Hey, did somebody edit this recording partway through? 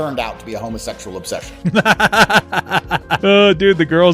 yes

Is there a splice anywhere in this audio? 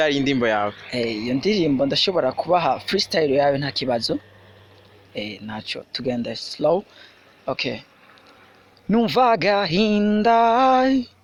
no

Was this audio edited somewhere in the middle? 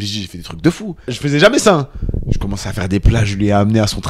yes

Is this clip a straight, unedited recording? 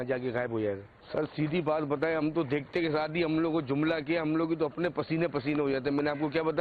no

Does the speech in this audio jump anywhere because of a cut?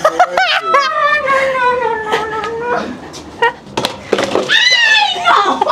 yes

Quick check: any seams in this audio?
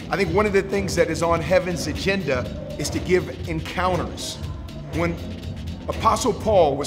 no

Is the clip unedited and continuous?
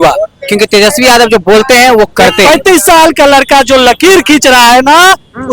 no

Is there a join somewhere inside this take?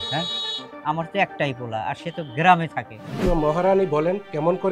yes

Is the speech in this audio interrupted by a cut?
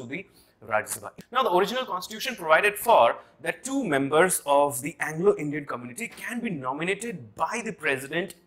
yes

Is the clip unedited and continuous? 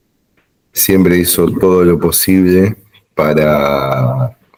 yes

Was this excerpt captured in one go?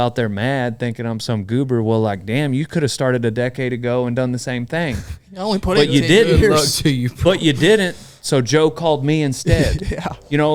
yes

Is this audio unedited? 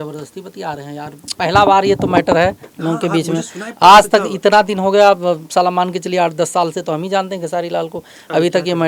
yes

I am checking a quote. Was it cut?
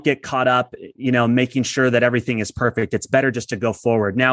no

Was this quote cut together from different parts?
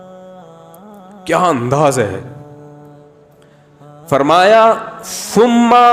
yes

